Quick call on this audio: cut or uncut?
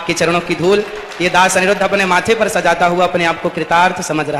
uncut